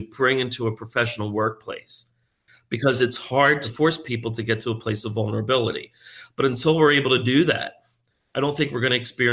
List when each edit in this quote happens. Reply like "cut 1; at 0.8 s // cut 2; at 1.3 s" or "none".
none